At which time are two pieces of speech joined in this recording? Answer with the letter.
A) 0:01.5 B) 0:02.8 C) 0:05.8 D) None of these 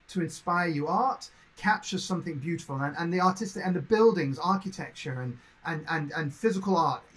D